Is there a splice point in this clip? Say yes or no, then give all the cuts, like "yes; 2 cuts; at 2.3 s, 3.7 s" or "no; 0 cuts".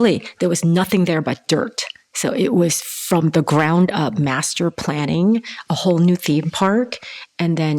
no; 0 cuts